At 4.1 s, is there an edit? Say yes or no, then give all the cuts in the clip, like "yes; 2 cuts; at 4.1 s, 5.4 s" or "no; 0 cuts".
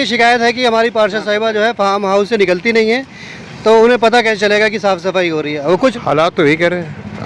no; 1 cut; at 5.8 s